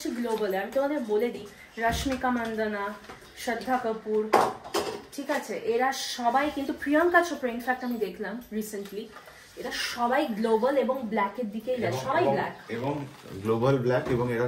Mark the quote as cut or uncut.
uncut